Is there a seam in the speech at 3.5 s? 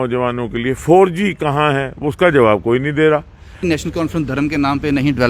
yes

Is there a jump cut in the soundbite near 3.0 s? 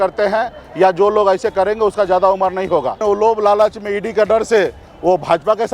yes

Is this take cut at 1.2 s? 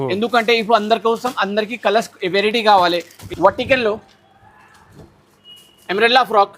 no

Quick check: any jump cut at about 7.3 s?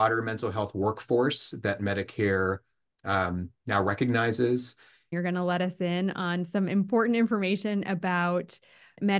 no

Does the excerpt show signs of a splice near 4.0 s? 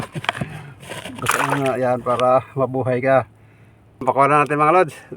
yes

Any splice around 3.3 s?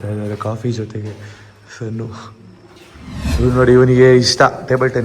yes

